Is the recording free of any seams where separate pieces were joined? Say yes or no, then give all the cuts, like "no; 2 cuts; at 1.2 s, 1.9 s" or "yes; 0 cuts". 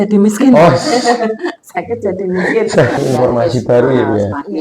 no; 1 cut; at 3.0 s